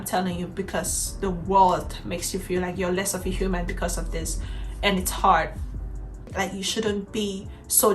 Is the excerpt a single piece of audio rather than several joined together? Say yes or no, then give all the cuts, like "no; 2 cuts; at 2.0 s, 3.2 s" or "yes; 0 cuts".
no; 1 cut; at 6.0 s